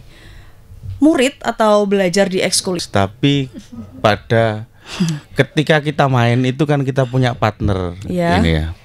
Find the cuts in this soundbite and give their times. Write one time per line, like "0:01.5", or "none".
0:02.8